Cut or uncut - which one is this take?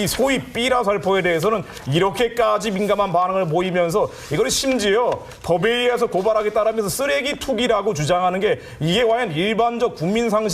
cut